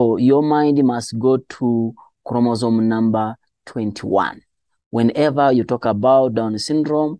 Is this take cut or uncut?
uncut